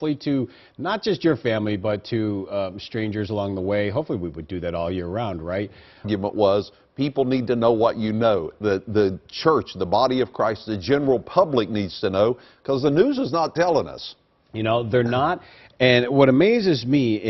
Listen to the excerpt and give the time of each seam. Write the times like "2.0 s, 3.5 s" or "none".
none